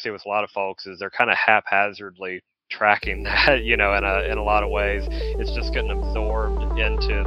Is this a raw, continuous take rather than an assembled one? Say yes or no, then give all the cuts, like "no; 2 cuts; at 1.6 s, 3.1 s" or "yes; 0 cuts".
yes; 0 cuts